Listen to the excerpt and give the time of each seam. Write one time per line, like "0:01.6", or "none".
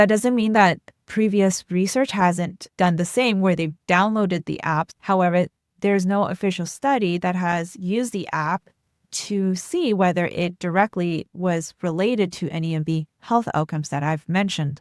0:04.9